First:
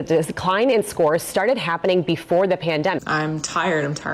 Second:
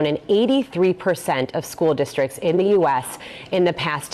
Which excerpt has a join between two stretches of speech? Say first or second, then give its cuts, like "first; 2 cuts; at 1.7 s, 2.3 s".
first; 1 cut; at 3.0 s